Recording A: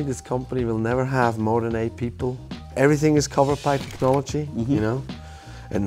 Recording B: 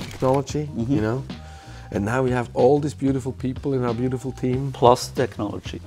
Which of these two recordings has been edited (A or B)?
A